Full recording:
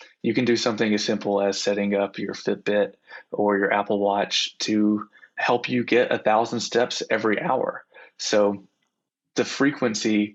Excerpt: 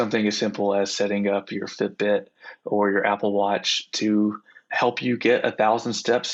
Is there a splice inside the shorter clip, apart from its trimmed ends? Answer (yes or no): no